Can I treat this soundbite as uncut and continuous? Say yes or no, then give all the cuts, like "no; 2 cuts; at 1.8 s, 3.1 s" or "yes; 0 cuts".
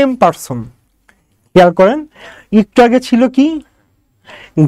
yes; 0 cuts